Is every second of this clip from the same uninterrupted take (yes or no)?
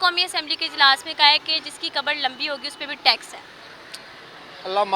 yes